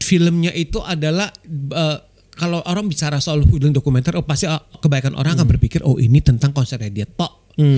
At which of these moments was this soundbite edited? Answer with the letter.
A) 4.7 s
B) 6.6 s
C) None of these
A